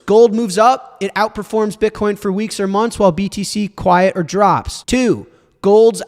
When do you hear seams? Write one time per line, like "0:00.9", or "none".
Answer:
0:04.7